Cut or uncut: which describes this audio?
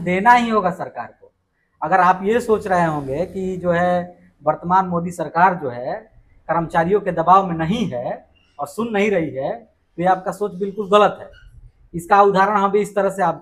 uncut